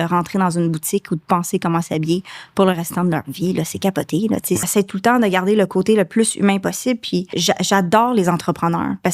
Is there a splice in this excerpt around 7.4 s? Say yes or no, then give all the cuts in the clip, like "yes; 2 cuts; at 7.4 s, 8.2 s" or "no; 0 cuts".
yes; 2 cuts; at 4.6 s, 7.4 s